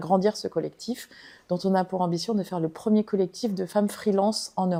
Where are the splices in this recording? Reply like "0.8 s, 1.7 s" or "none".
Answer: none